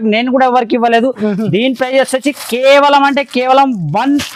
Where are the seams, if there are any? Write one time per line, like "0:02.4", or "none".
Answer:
none